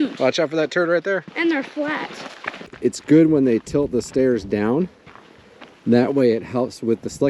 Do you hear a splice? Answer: yes; 1 cut; at 2.6 s

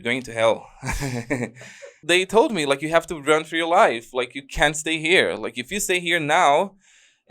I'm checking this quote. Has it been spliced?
yes; 1 cut; at 2.0 s

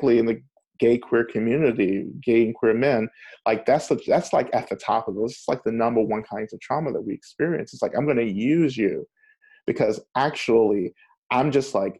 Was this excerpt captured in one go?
yes; 0 cuts

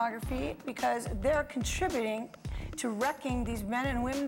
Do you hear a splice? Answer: no; 0 cuts

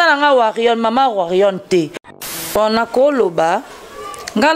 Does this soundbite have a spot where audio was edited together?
yes; 1 cut; at 1.9 s

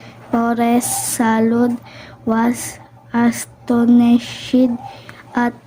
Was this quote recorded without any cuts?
no; 1 cut; at 1.0 s

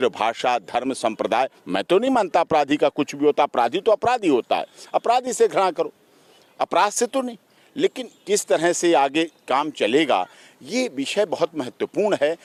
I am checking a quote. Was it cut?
no; 0 cuts

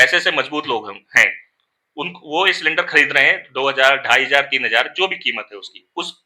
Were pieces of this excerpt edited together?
no; 0 cuts

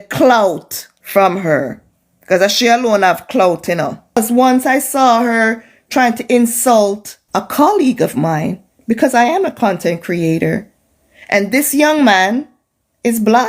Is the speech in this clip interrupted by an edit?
yes; 1 cut; at 4.2 s

